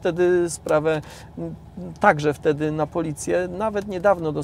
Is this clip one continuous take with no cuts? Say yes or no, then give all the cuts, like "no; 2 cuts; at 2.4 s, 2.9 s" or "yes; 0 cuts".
yes; 0 cuts